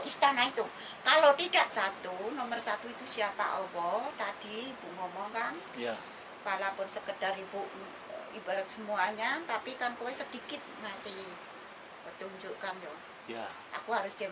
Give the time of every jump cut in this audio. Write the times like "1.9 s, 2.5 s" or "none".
1.7 s